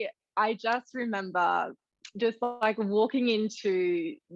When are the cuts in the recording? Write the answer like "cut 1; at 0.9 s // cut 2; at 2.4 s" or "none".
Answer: none